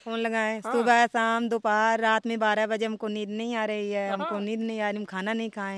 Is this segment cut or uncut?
uncut